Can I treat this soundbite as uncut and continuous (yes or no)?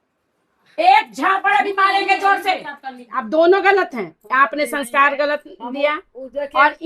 no